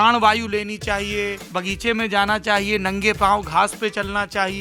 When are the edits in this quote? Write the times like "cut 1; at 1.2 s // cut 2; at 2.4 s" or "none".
cut 1; at 1.4 s